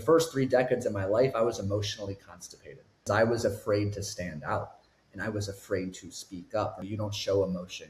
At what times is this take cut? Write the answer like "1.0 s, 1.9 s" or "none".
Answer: 3.1 s, 6.8 s